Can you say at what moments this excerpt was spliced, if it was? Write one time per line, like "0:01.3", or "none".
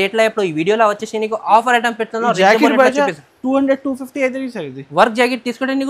none